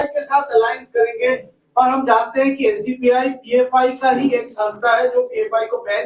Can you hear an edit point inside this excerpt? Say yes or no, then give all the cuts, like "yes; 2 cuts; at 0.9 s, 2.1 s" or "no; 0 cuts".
no; 0 cuts